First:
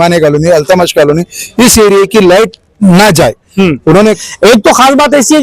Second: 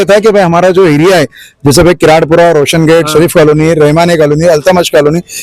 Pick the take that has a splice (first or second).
first